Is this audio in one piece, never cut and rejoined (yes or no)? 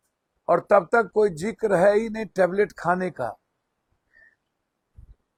yes